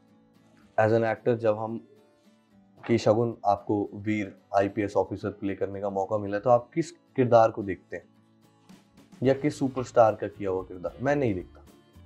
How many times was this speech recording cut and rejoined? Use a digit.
0